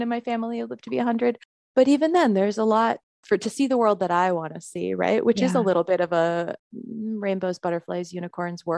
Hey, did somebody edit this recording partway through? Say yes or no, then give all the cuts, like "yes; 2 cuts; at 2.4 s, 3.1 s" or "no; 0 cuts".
yes; 3 cuts; at 1.5 s, 3.1 s, 6.6 s